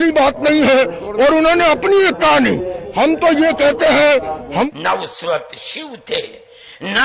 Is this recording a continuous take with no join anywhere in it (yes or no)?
no